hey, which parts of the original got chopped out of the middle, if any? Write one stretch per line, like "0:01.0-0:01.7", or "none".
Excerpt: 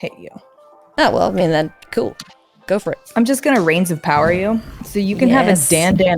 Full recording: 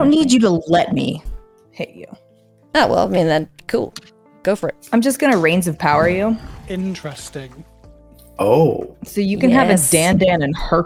0:06.5-0:09.0